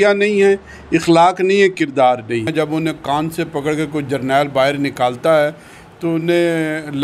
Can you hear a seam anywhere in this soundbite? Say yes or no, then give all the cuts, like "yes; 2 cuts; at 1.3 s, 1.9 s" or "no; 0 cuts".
yes; 1 cut; at 2.5 s